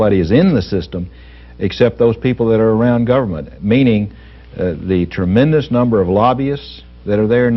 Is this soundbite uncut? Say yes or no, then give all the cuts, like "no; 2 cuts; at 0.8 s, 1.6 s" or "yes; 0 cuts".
no; 1 cut; at 3.7 s